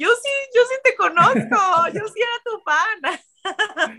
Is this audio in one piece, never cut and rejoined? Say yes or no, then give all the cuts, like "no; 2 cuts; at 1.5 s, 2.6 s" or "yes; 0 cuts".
yes; 0 cuts